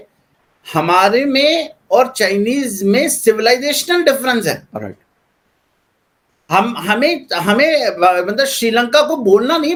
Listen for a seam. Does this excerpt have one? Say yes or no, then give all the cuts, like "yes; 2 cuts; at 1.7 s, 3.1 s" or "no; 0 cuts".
no; 0 cuts